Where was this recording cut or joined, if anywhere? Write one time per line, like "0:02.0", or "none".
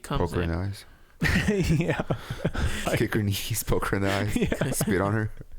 0:02.8